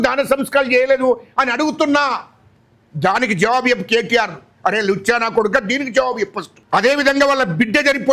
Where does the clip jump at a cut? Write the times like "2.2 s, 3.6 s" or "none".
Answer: 6.5 s